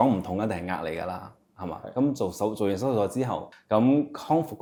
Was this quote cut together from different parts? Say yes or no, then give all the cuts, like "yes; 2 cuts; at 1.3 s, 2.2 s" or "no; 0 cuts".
no; 0 cuts